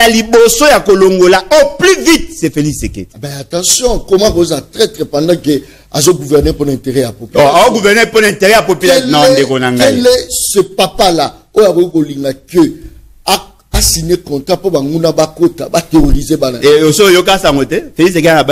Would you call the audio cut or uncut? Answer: uncut